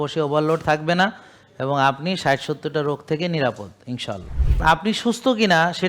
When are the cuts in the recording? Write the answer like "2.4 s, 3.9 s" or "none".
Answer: 4.6 s